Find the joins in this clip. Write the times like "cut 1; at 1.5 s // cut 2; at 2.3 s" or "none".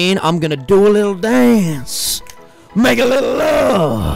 none